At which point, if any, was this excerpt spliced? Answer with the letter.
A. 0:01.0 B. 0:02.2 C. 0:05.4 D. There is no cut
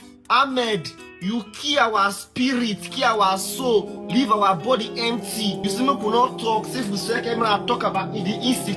A